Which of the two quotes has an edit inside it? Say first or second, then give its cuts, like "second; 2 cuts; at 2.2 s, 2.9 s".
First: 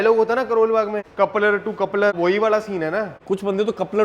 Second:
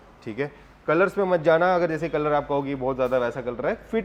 first; 3 cuts; at 1.0 s, 2.1 s, 3.1 s